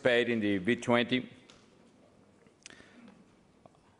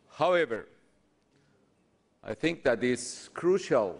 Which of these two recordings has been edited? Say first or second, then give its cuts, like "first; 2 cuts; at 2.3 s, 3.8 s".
second; 1 cut; at 1.0 s